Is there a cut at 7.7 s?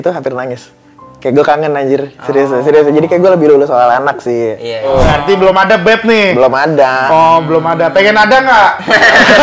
no; 1 cut; at 4.9 s

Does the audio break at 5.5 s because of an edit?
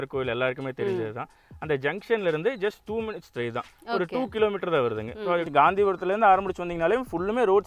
yes; 1 cut; at 5.5 s

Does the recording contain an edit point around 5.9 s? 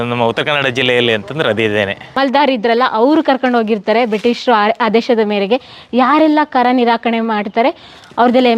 no; 1 cut; at 2.1 s

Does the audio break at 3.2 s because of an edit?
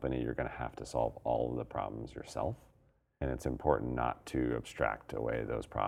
yes; 1 cut; at 3.2 s

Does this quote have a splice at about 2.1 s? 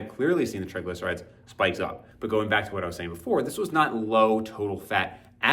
yes; 1 cut; at 2.1 s

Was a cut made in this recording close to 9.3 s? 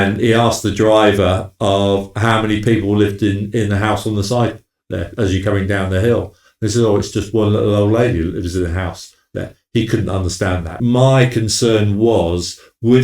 no; 1 cut; at 10.8 s

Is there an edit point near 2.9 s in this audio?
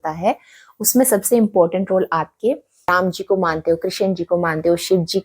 yes; 1 cut; at 2.9 s

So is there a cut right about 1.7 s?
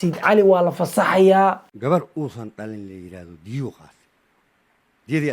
yes; 1 cut; at 1.7 s

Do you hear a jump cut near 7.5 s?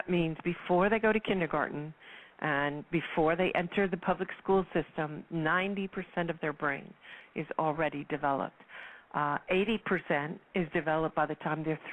yes; 1 cut; at 7.5 s

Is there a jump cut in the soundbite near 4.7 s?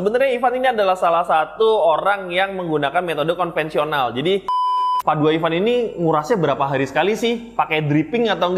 yes; 1 cut; at 4.7 s

